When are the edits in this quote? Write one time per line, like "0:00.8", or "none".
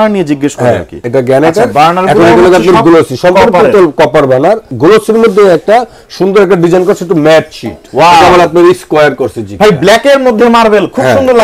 0:01.0
0:04.7
0:07.8